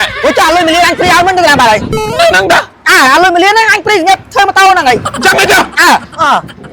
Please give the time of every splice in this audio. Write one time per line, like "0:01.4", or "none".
0:05.1